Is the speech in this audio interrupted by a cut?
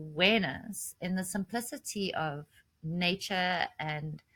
no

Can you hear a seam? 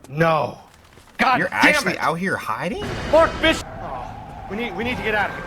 yes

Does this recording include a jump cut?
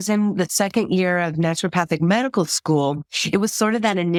no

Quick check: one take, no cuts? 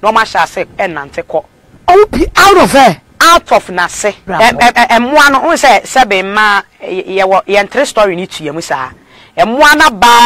no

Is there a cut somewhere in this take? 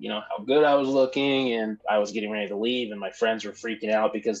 yes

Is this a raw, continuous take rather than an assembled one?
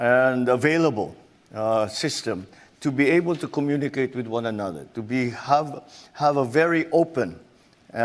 yes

